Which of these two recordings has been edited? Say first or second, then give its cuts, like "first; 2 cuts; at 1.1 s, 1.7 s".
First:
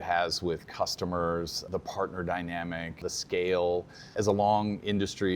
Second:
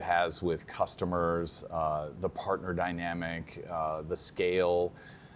first; 3 cuts; at 1.6 s, 3.0 s, 4.1 s